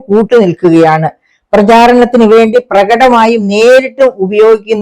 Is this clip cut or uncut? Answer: uncut